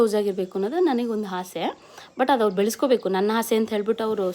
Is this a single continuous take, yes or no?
yes